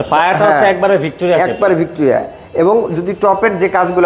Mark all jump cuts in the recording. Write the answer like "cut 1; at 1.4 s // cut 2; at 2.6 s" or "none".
none